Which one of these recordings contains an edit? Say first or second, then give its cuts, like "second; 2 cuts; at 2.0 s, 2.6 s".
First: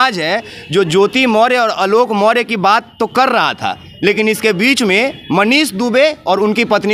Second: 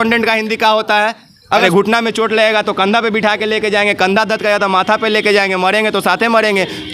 second; 1 cut; at 1.6 s